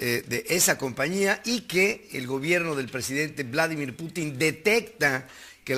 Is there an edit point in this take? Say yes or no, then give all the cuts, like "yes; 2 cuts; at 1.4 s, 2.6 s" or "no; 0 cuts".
no; 0 cuts